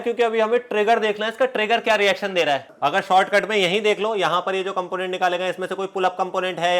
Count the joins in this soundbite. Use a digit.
1